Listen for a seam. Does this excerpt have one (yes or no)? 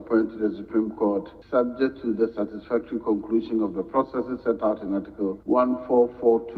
yes